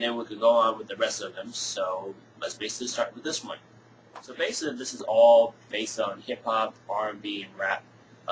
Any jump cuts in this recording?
no; 0 cuts

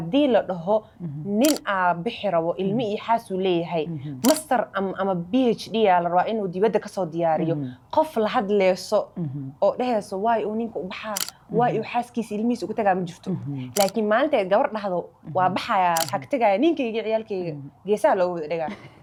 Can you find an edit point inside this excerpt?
no; 0 cuts

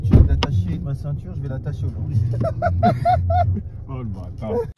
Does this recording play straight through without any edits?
yes; 0 cuts

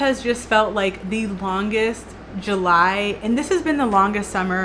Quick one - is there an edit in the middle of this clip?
no; 0 cuts

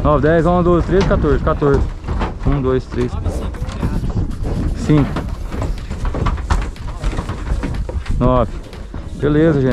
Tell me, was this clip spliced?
no; 0 cuts

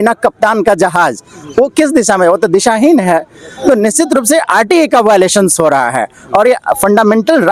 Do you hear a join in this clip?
no; 0 cuts

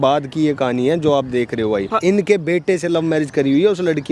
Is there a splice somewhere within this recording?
yes; 1 cut; at 1.9 s

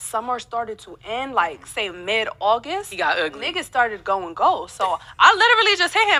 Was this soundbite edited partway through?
no; 0 cuts

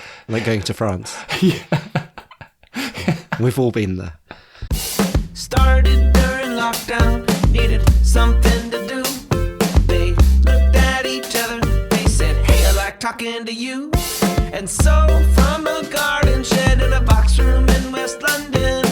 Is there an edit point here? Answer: yes; 1 cut; at 4.7 s

